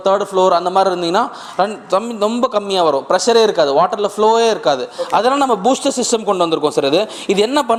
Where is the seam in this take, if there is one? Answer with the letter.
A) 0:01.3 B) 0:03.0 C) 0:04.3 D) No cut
D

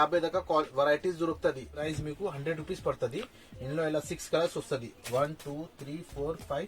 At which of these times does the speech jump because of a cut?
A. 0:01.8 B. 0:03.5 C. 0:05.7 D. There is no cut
A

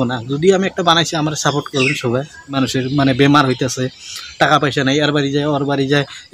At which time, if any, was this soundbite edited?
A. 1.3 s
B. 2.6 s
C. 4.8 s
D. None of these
B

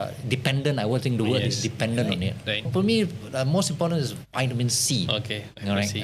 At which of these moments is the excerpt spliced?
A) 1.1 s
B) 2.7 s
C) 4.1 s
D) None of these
B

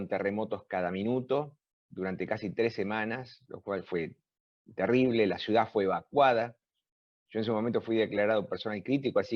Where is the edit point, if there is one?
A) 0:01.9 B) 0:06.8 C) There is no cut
C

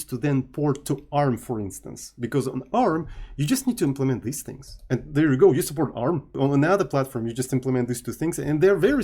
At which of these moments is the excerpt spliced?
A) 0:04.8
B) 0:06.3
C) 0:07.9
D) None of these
B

